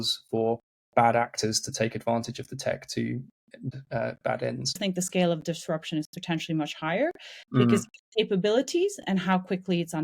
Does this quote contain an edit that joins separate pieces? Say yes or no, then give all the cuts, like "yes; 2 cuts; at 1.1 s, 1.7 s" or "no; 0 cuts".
yes; 2 cuts; at 3.7 s, 4.7 s